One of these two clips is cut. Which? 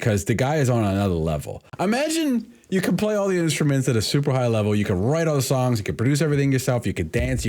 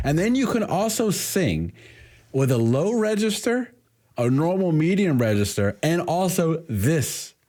first; 1 cut; at 1.6 s

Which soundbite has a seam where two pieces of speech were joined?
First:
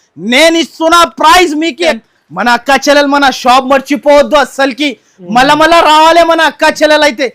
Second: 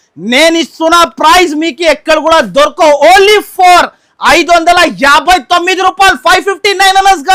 first; 1 cut; at 2.0 s

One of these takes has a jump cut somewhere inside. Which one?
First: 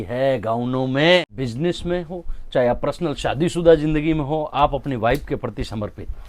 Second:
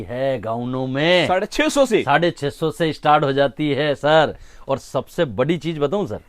first; 1 cut; at 1.2 s

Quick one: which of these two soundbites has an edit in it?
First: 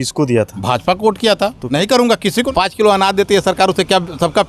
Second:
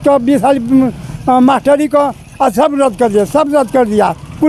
first; 2 cuts; at 1.6 s, 2.5 s

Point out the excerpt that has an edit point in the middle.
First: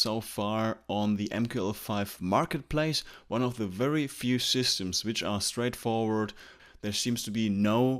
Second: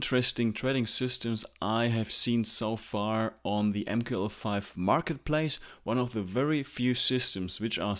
first; 1 cut; at 6.7 s

